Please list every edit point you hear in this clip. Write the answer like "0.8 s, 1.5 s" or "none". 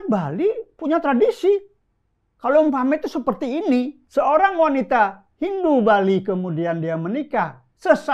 4.0 s